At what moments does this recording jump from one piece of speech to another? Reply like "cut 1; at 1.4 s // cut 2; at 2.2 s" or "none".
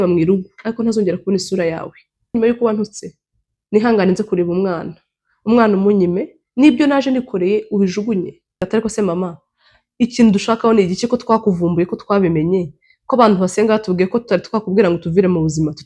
cut 1; at 2.3 s // cut 2; at 8.6 s